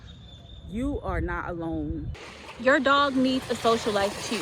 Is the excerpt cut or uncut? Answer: cut